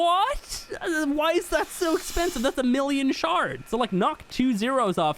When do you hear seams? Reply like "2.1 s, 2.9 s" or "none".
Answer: 3.6 s